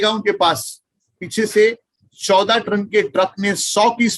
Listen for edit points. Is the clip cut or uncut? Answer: cut